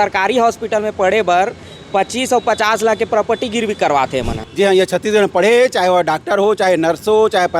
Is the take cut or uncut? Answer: cut